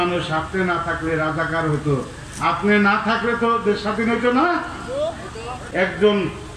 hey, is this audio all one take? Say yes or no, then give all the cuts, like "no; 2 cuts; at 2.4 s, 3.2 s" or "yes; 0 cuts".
no; 1 cut; at 5.6 s